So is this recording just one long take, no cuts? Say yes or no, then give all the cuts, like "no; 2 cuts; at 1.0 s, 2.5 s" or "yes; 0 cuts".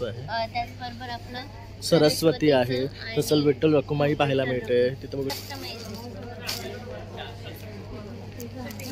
no; 1 cut; at 5.4 s